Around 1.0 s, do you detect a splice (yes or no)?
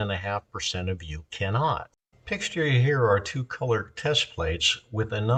no